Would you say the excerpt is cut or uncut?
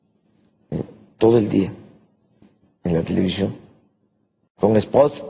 uncut